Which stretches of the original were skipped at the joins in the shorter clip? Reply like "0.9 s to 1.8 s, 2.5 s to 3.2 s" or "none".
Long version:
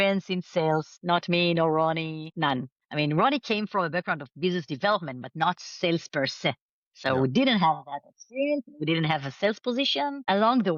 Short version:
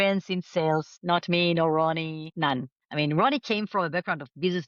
none